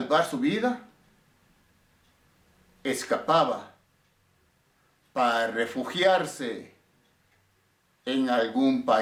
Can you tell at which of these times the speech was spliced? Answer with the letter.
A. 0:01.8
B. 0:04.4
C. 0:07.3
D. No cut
D